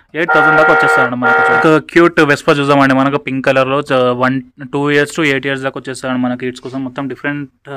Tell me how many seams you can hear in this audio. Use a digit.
1